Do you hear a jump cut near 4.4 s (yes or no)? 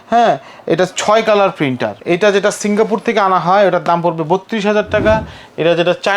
no